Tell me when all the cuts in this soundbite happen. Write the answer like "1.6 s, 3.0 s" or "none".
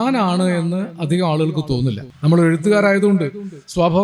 2.0 s